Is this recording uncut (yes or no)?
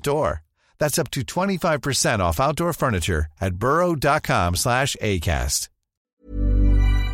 no